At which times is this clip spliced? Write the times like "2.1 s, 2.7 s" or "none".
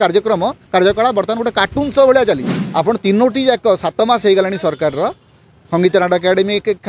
2.6 s